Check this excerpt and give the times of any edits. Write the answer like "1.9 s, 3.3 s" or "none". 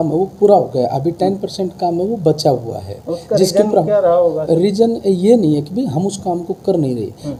none

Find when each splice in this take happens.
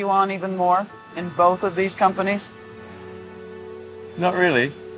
none

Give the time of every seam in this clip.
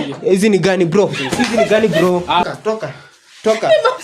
2.4 s

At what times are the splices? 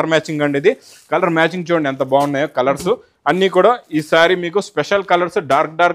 none

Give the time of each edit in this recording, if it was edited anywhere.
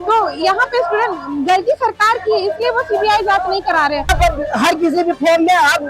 4.1 s

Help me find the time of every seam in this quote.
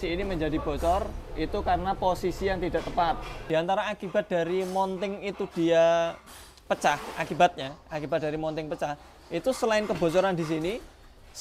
3.4 s

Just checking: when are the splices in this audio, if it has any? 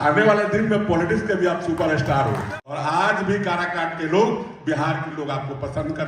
2.6 s

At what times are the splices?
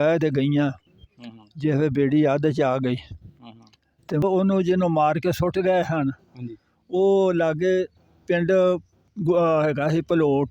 4.2 s

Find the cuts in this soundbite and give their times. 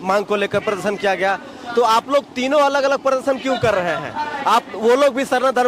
none

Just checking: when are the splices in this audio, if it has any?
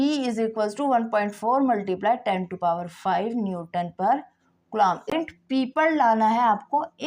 5.1 s

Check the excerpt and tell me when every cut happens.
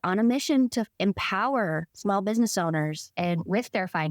0.9 s, 1.9 s, 3.0 s

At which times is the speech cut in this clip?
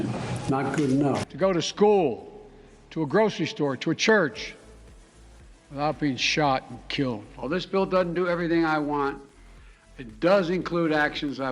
1.3 s, 7.3 s

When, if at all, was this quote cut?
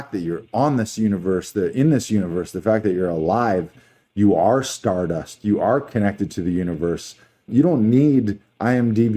7.5 s

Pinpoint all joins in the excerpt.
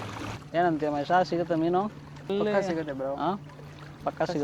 2.3 s

